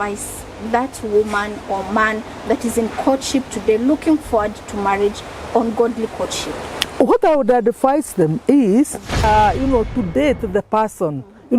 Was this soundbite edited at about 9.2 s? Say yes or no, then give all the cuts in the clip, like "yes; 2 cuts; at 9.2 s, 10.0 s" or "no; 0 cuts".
yes; 1 cut; at 9.2 s